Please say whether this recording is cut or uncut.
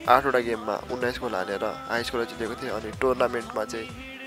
uncut